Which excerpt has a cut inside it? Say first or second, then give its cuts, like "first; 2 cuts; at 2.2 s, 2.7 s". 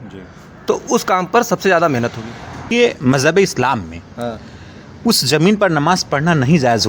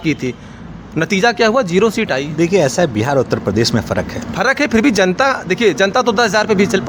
first; 1 cut; at 2.7 s